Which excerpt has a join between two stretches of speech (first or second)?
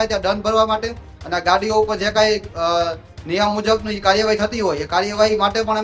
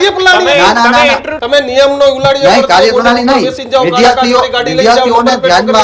second